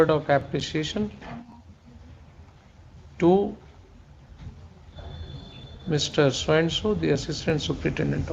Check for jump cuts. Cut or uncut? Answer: uncut